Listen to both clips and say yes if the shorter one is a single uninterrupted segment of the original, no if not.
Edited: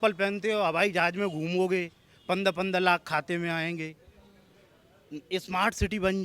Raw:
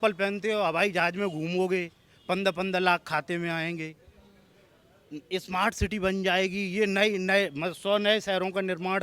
yes